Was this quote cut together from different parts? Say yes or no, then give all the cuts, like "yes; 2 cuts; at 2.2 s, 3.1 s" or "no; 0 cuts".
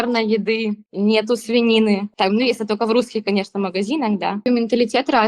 yes; 3 cuts; at 0.8 s, 2.1 s, 4.5 s